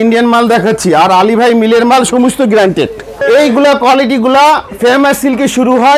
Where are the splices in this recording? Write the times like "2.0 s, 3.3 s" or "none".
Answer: 3.2 s